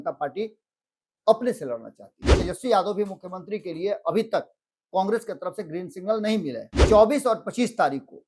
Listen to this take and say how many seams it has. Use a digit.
2